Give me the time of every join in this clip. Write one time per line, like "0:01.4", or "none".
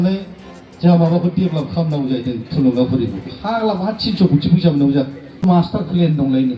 0:05.4